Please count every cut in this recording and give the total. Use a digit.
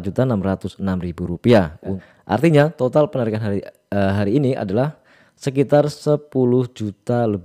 1